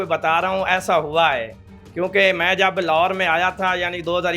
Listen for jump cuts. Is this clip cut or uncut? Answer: uncut